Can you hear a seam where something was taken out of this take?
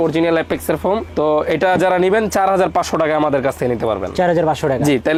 no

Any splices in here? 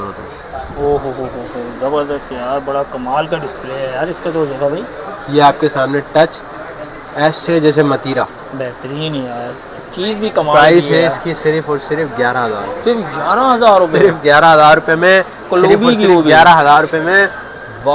no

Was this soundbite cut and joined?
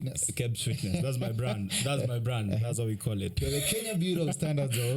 yes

